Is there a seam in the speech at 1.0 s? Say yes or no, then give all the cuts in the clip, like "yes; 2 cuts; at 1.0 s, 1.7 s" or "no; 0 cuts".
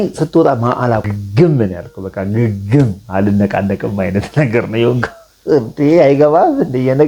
yes; 1 cut; at 1.0 s